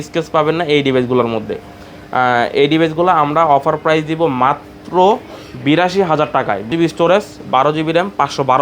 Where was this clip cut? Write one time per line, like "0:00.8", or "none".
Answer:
0:06.7